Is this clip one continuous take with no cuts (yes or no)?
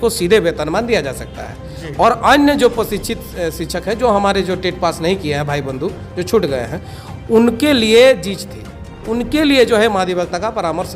yes